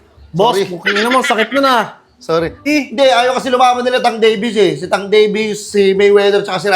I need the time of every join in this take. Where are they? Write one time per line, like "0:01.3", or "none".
0:02.6